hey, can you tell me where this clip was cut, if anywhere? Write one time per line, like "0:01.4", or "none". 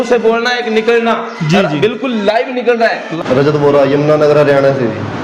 0:03.0